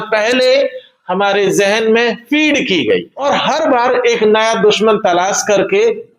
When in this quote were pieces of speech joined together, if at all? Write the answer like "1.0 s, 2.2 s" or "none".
3.1 s